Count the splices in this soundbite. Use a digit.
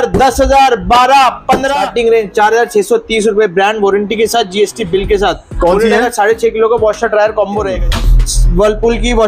2